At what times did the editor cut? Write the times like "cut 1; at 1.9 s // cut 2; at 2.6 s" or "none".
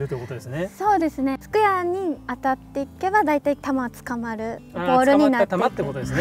cut 1; at 1.4 s

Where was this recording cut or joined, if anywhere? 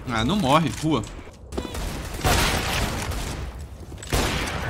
cut 1; at 1.4 s

